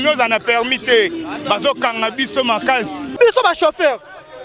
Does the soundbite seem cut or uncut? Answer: cut